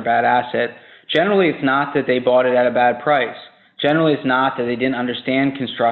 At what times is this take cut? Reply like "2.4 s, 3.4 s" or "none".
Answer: none